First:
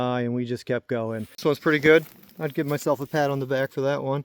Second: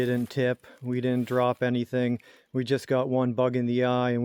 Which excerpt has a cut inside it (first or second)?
first